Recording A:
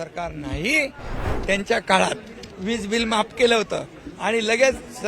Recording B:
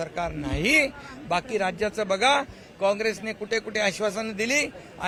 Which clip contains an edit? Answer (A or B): A